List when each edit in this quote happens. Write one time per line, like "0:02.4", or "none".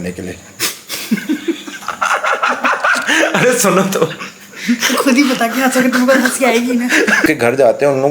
0:01.8
0:07.3